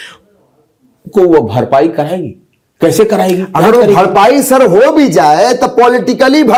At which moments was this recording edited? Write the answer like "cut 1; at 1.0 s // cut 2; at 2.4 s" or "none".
none